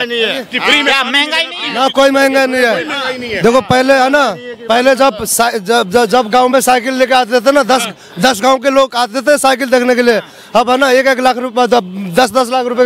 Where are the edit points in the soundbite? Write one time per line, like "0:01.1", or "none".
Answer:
none

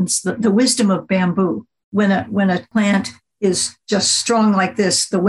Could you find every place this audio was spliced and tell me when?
0:01.9
0:02.7
0:03.7

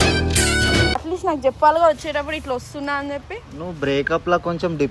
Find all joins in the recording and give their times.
0:01.0

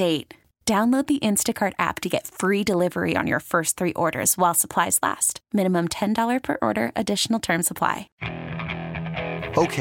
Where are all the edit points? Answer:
0:08.1

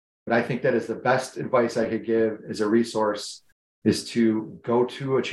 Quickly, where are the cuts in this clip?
none

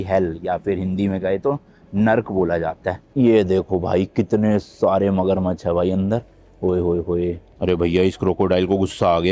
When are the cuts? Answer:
0:03.1
0:07.5

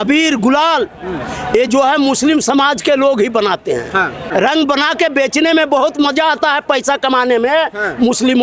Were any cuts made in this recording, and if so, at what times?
0:04.2

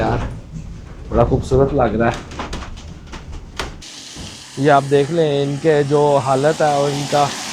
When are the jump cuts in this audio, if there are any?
0:03.8

